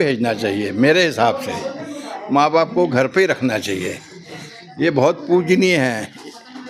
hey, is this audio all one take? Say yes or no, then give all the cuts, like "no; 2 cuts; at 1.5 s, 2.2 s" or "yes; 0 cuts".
yes; 0 cuts